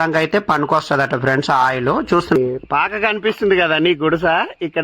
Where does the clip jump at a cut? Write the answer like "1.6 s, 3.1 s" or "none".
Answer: 2.4 s